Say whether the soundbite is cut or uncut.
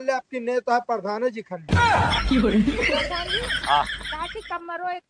cut